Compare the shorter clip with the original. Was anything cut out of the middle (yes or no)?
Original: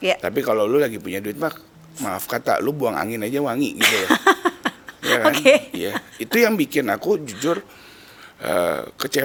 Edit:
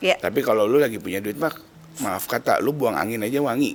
no